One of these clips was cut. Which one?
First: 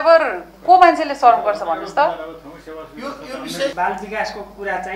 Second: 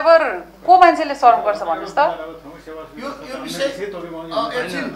first; 1 cut; at 3.7 s

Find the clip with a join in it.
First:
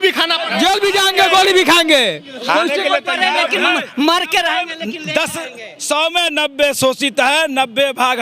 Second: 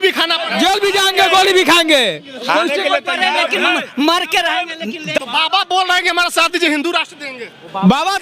second; 1 cut; at 5.2 s

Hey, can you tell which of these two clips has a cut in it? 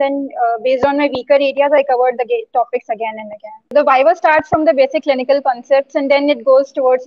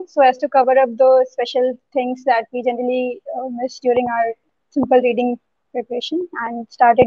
first; 1 cut; at 3.7 s

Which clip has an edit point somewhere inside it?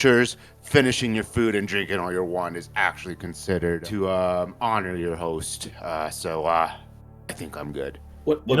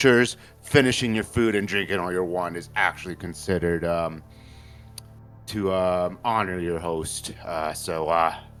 first; 1 cut; at 3.8 s

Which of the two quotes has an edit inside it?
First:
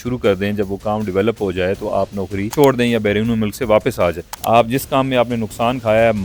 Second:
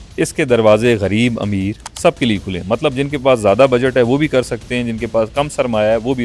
first; 2 cuts; at 2.5 s, 4.3 s

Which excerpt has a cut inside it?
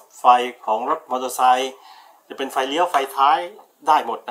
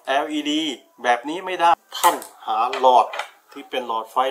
second; 1 cut; at 1.7 s

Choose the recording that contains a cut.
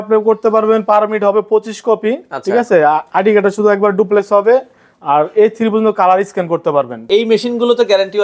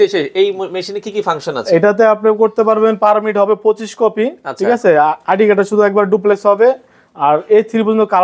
first; 1 cut; at 7.0 s

